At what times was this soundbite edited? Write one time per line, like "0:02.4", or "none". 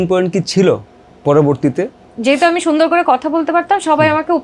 0:02.0